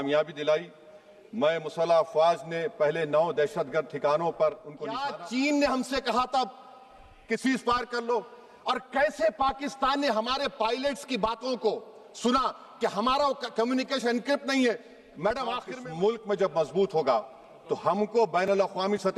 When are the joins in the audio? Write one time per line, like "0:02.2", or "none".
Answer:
0:05.0
0:15.7